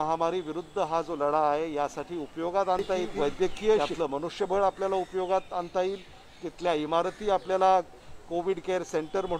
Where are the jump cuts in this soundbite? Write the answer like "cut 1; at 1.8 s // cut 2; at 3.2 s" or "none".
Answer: cut 1; at 3.1 s // cut 2; at 3.8 s